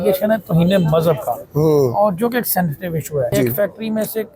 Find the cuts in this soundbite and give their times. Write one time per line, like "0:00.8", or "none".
0:03.3